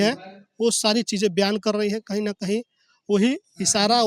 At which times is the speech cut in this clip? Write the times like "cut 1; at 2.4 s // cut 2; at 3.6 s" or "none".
none